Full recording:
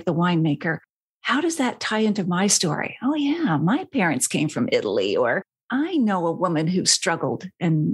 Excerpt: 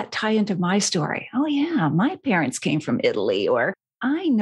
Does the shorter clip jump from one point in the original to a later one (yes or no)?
no